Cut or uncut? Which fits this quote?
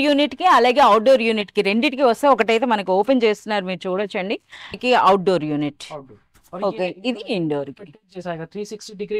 cut